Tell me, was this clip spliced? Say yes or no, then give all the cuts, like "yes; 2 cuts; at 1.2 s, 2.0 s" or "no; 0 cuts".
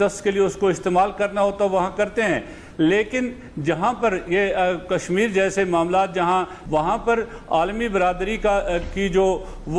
no; 0 cuts